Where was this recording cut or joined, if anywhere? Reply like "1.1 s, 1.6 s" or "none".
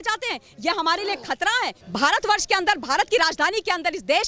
1.8 s